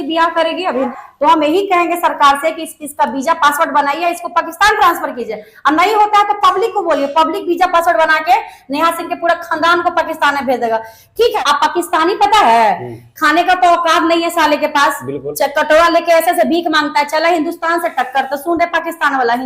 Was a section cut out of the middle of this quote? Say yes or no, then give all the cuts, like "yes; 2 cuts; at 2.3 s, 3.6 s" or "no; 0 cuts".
yes; 2 cuts; at 1.0 s, 11.4 s